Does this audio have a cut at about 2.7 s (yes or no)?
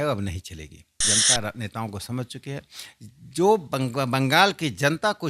no